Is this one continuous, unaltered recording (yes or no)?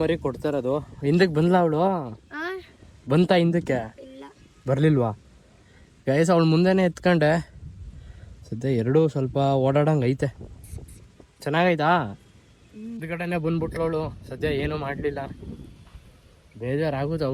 yes